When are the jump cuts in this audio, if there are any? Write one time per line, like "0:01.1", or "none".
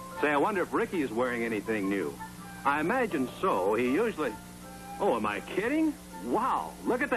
none